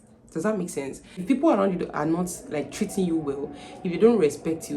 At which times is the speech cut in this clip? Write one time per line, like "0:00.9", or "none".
0:01.1